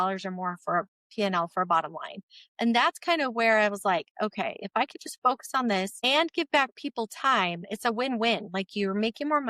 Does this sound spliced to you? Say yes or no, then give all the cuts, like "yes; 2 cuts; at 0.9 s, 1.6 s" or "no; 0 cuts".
yes; 1 cut; at 6.0 s